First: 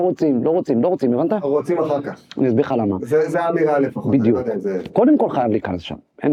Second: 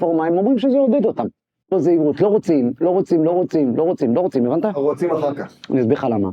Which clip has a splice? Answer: second; 1 cut; at 1.6 s

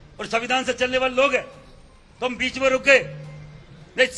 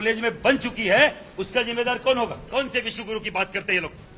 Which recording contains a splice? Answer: second; 1 cut; at 2.4 s

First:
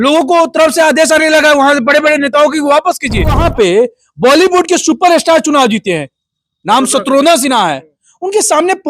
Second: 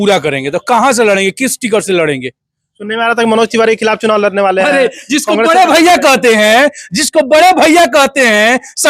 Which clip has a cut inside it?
first; 1 cut; at 3.4 s

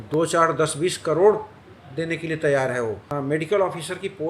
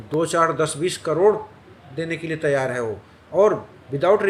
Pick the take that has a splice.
first; 1 cut; at 3.1 s

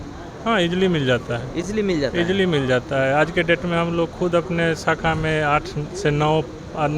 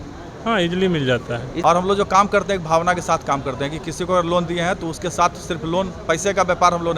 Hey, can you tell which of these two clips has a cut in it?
second; 1 cut; at 1.5 s

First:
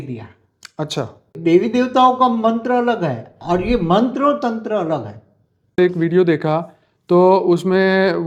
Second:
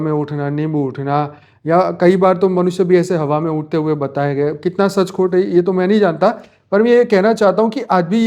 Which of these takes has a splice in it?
first; 2 cuts; at 1.3 s, 5.8 s

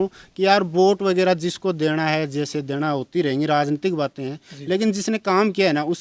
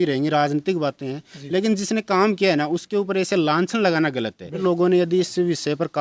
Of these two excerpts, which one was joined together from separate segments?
second; 1 cut; at 4.6 s

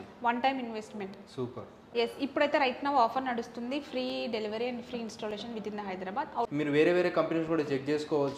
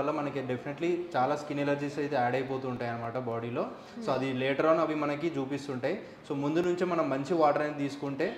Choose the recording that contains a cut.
first; 2 cuts; at 1.8 s, 6.5 s

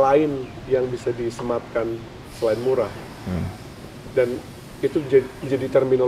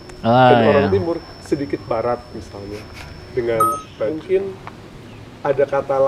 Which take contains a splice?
second; 1 cut; at 3.9 s

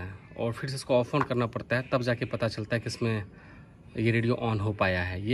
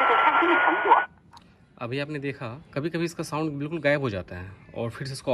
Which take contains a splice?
second; 1 cut; at 2.6 s

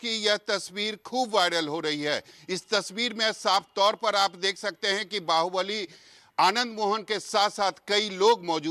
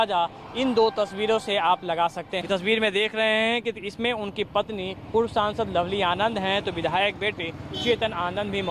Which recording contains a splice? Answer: second; 1 cut; at 2.3 s

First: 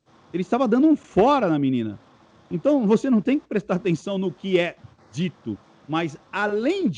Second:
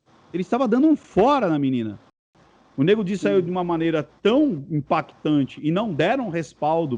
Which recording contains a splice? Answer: second; 1 cut; at 2.4 s

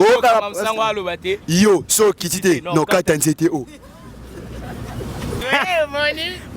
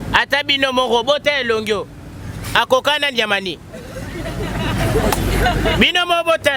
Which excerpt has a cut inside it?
first; 1 cut; at 5.4 s

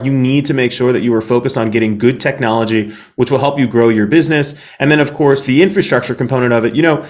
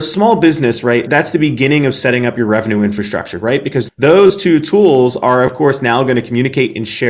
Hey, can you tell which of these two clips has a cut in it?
second; 2 cuts; at 1.1 s, 3.9 s

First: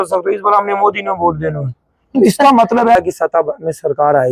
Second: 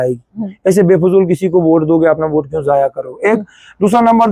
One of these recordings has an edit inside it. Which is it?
first; 1 cut; at 3.0 s

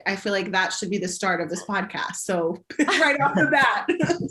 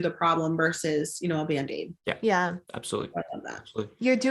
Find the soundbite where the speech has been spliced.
second; 2 cuts; at 1.9 s, 2.7 s

